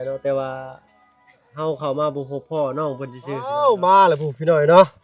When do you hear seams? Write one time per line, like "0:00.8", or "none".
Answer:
0:03.6